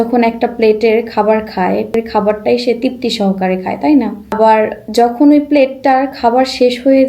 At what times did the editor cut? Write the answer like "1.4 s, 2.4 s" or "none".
2.0 s, 4.4 s